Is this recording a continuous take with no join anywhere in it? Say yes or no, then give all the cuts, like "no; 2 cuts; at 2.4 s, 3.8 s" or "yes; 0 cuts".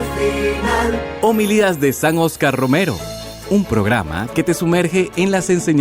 no; 1 cut; at 1.1 s